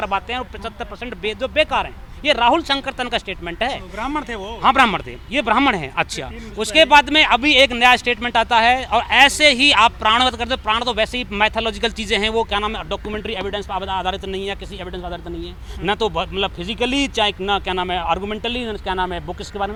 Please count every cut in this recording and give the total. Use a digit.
0